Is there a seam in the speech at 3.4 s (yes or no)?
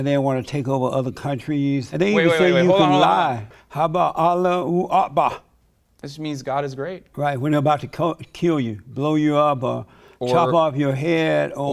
yes